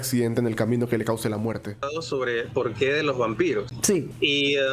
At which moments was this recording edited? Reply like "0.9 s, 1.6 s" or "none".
1.9 s, 3.9 s